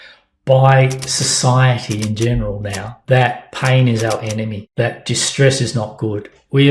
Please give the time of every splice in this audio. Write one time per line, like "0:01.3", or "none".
0:02.9
0:04.6